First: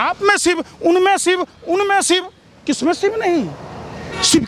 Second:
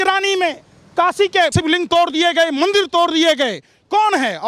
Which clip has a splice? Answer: second; 1 cut; at 1.5 s

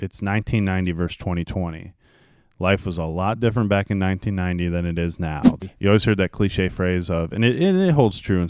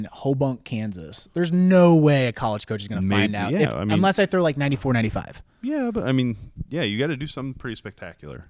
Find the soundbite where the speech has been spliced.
first; 1 cut; at 5.5 s

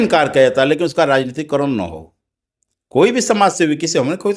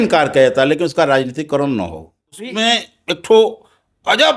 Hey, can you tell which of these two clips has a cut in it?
second; 1 cut; at 2.5 s

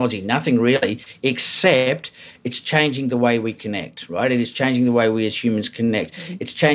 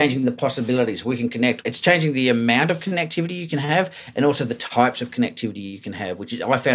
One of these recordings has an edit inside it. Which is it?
second; 2 cuts; at 1.7 s, 3.4 s

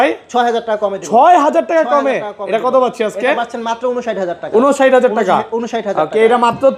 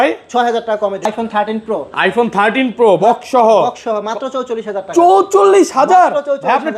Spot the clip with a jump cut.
second; 1 cut; at 1.1 s

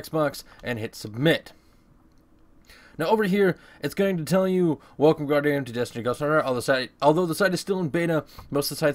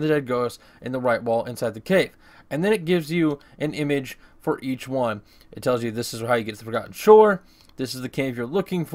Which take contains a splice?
first; 1 cut; at 4.5 s

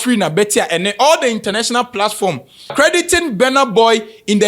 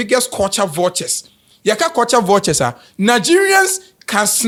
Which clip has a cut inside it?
first; 1 cut; at 2.6 s

